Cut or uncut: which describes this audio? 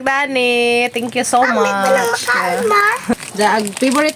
cut